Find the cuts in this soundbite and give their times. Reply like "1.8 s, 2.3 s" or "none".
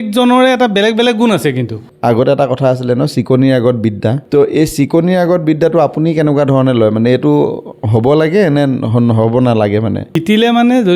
1.8 s, 4.2 s, 10.1 s